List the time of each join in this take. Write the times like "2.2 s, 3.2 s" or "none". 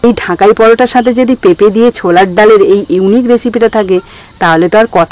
none

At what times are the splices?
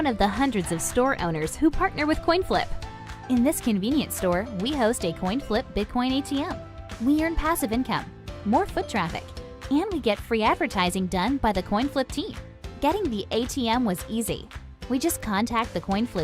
15.2 s

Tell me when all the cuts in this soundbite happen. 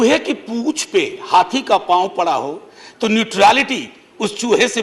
none

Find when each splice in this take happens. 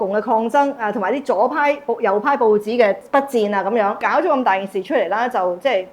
3.0 s, 4.0 s

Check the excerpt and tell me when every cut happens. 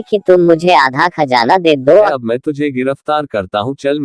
2.1 s

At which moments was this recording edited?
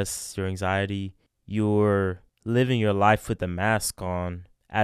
none

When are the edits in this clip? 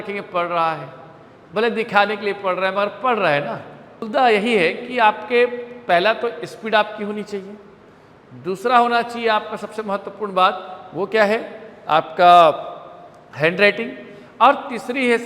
3.9 s

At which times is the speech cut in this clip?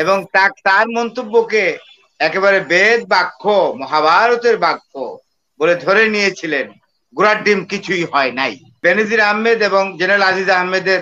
8.8 s

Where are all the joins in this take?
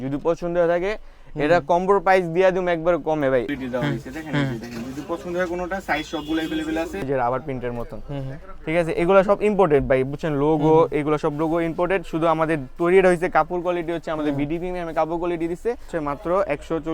3.5 s, 7.0 s, 15.9 s

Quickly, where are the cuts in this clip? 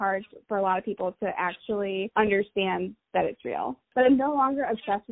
2.1 s, 3.8 s

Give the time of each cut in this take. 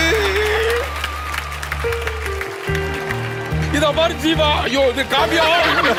none

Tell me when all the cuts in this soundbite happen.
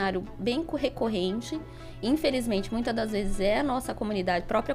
none

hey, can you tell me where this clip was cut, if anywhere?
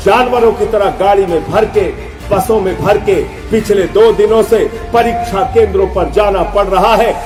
none

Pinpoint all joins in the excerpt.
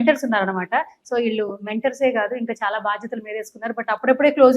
none

